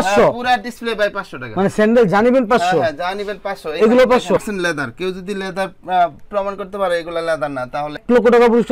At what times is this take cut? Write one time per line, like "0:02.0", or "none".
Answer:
none